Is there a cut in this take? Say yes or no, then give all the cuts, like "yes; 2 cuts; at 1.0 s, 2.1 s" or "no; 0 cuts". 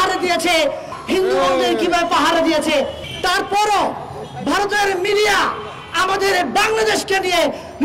yes; 2 cuts; at 0.9 s, 3.0 s